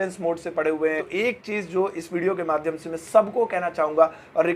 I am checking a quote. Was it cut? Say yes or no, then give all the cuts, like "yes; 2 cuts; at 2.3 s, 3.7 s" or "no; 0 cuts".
yes; 1 cut; at 1.1 s